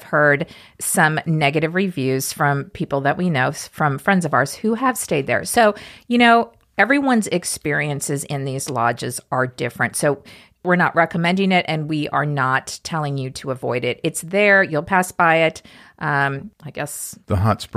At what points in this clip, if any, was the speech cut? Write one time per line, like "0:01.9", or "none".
none